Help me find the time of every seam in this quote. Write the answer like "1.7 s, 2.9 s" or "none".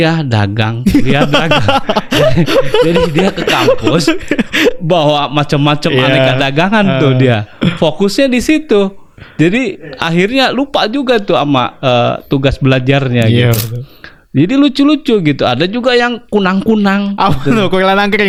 none